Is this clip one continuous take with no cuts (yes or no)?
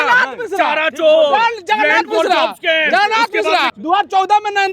no